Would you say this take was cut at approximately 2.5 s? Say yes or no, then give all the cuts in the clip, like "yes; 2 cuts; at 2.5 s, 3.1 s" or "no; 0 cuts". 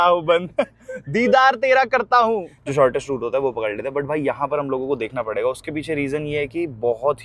yes; 1 cut; at 2.5 s